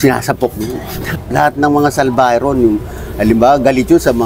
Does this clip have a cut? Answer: no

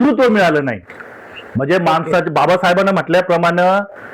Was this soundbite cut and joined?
no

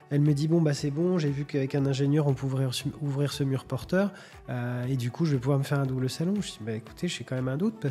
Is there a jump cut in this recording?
no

